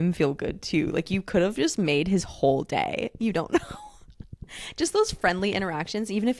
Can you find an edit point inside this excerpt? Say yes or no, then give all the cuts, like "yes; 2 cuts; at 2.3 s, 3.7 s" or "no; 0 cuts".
no; 0 cuts